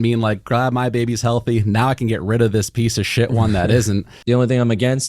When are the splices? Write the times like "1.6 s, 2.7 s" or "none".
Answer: 4.2 s